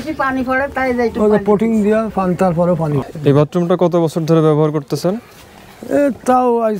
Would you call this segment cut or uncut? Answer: cut